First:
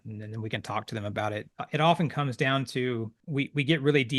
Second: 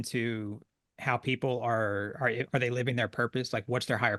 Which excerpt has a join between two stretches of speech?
first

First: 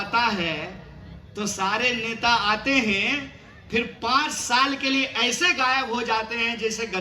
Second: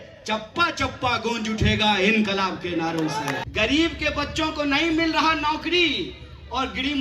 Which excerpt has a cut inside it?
second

